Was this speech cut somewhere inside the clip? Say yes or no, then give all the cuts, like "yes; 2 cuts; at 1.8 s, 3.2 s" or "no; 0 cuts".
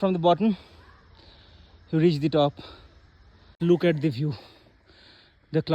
yes; 1 cut; at 3.5 s